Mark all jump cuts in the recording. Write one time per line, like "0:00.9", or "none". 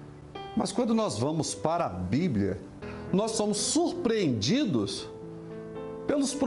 0:02.8